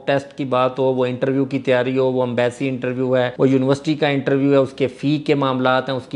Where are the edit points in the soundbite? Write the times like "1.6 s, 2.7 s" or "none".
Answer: none